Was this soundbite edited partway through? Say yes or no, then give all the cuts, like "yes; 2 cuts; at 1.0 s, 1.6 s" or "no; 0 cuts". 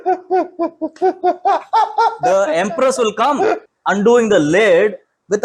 yes; 1 cut; at 3.6 s